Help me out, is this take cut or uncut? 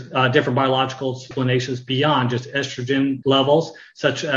cut